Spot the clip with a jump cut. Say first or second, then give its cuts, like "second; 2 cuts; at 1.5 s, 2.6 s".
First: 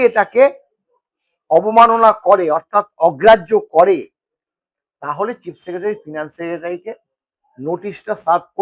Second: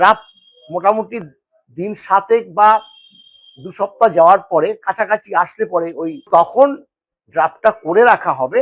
second; 1 cut; at 6.3 s